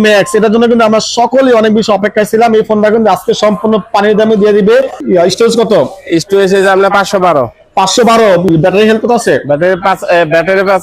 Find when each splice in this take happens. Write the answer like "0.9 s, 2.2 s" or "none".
none